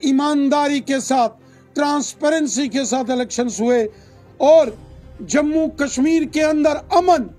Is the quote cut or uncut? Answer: uncut